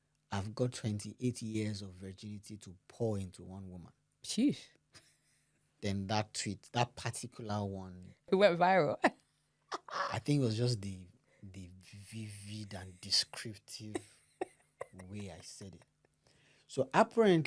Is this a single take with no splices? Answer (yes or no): no